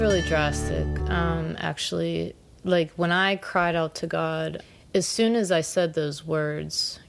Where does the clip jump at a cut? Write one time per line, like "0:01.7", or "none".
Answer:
0:04.6